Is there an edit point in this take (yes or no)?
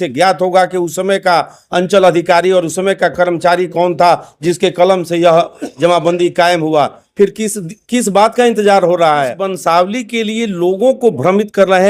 yes